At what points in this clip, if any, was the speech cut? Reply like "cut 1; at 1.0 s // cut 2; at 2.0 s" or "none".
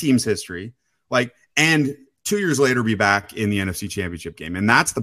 cut 1; at 3.3 s